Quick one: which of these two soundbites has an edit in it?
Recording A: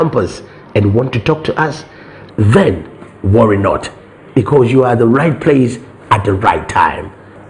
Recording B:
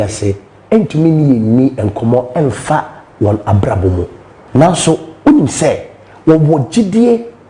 B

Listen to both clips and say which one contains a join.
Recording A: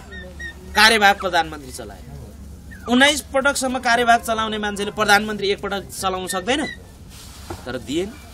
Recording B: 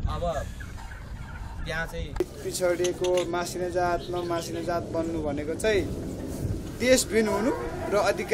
B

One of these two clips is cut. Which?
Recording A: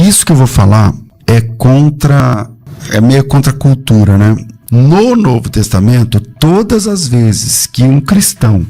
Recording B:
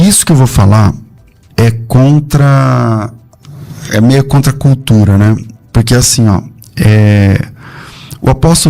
A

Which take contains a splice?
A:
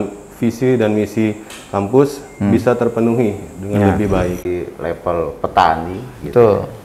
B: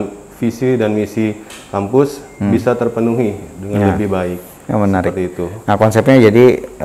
A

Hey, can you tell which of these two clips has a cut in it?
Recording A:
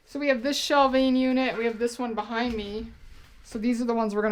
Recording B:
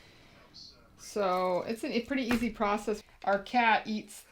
B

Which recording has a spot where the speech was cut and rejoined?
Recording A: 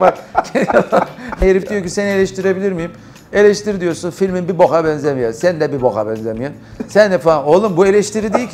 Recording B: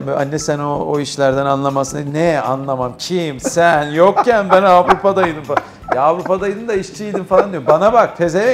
A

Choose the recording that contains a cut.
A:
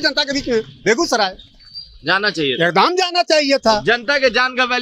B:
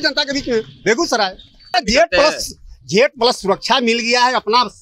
B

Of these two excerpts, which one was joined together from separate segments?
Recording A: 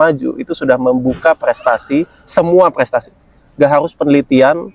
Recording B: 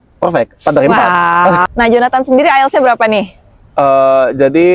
B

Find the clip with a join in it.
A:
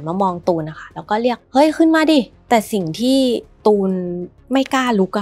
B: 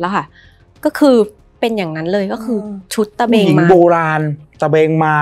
A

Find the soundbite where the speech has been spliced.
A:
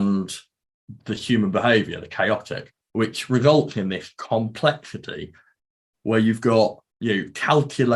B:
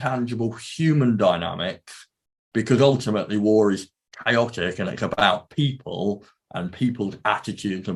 A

